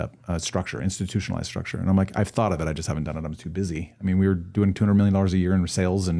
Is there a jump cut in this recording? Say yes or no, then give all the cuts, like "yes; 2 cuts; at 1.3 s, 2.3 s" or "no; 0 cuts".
no; 0 cuts